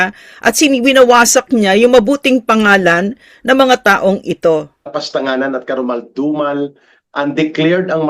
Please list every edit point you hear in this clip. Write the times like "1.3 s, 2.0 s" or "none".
5.0 s